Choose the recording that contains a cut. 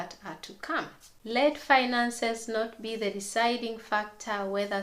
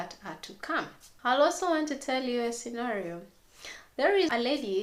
first; 1 cut; at 1.4 s

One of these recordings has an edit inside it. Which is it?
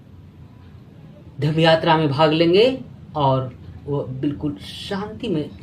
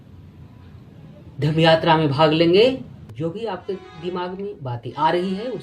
second; 1 cut; at 3.0 s

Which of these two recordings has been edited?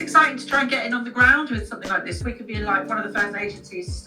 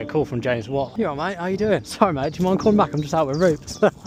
first; 1 cut; at 2.2 s

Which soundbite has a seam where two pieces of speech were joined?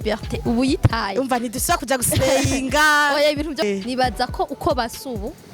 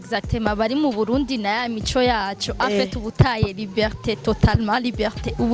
first; 1 cut; at 3.6 s

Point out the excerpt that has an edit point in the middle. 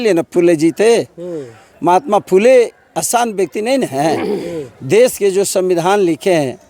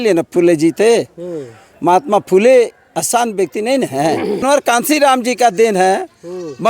second; 1 cut; at 4.4 s

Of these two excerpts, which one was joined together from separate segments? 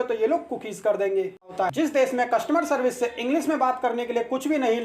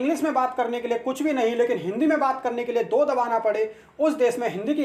first; 1 cut; at 1.5 s

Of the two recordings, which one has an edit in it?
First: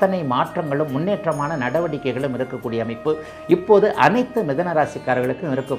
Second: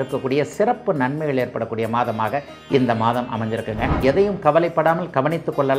second; 1 cut; at 4.0 s

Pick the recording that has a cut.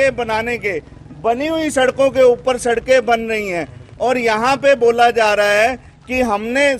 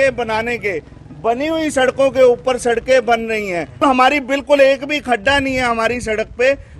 second; 1 cut; at 3.8 s

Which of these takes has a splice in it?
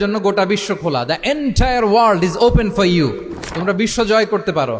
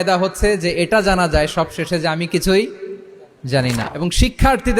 second; 1 cut; at 3.8 s

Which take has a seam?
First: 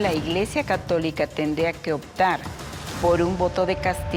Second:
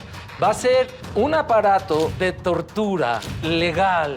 second; 3 cuts; at 1.0 s, 2.1 s, 3.3 s

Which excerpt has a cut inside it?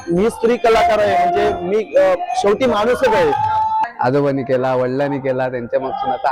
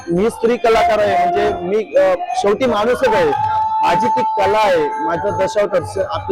first; 1 cut; at 3.8 s

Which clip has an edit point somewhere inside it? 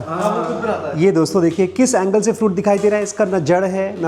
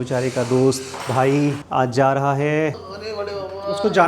second; 2 cuts; at 1.6 s, 2.8 s

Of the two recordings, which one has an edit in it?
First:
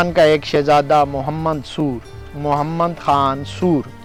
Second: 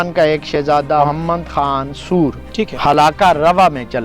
second; 2 cuts; at 1.0 s, 2.7 s

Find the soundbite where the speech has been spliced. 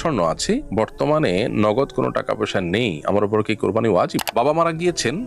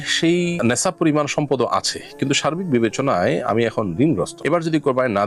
first; 1 cut; at 4.3 s

